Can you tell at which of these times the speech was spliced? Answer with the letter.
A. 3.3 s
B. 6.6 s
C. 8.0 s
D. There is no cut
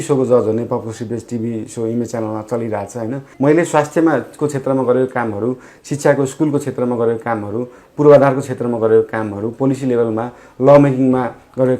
A